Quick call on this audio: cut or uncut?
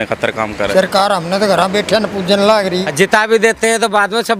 cut